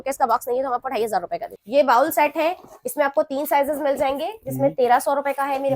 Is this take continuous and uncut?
no; 1 cut; at 1.5 s

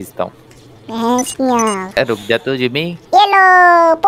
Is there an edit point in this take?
yes; 1 cut; at 2.0 s

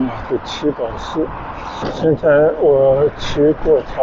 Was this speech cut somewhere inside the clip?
yes; 1 cut; at 1.9 s

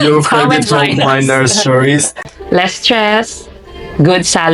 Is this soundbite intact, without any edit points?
no; 1 cut; at 2.3 s

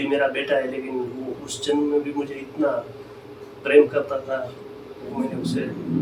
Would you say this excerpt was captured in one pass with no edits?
yes; 0 cuts

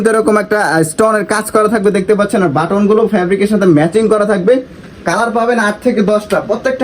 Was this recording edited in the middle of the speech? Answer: no; 0 cuts

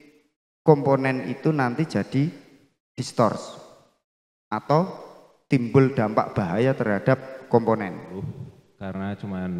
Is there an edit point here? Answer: yes; 1 cut; at 8.1 s

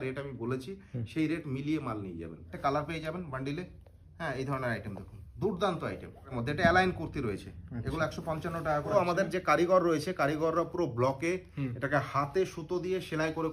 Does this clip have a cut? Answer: yes; 3 cuts; at 2.5 s, 6.3 s, 8.9 s

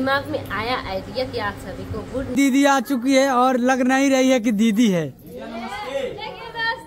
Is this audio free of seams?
no; 1 cut; at 2.3 s

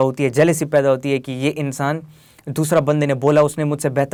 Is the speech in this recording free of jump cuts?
yes; 0 cuts

